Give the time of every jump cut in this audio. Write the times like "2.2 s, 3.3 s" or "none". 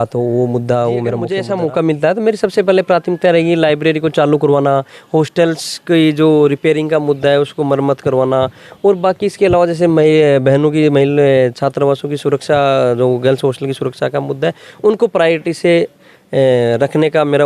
1.3 s